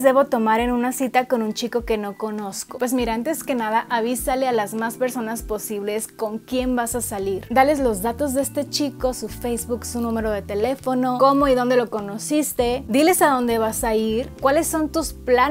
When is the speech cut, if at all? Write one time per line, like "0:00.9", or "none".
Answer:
none